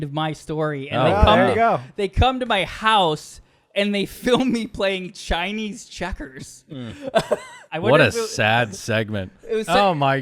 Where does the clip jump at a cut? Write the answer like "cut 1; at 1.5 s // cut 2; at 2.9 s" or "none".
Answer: cut 1; at 7.7 s